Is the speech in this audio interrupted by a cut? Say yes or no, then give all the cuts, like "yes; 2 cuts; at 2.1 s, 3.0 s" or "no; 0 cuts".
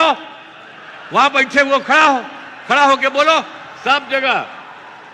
no; 0 cuts